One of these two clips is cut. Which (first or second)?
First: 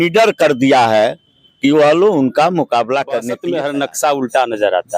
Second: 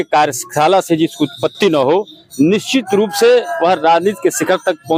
first